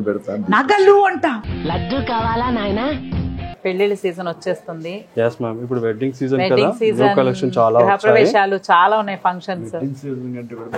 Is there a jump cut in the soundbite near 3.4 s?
yes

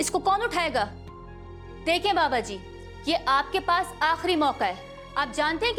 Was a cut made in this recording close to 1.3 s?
no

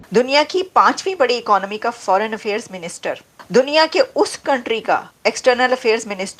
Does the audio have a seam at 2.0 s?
no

